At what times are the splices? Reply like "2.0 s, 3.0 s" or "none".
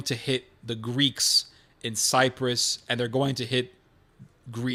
none